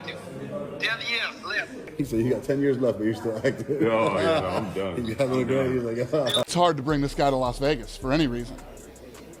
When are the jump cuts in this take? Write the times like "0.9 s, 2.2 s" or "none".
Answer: 6.5 s